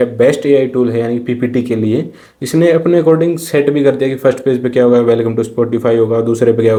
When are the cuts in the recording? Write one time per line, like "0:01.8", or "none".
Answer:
none

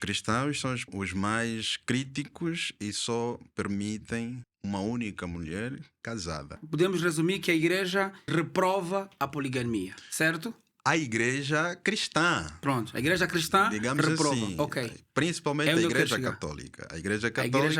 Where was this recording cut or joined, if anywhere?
0:00.9
0:06.6
0:08.2

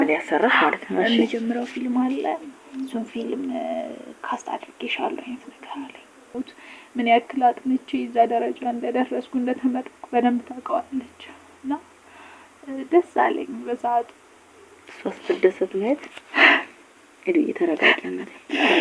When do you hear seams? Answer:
0:06.3

